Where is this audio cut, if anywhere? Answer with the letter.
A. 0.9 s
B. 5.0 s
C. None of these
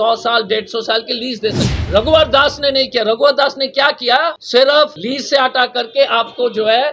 B